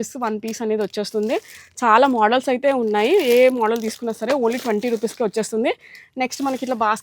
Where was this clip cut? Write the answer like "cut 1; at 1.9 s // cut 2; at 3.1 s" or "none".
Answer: none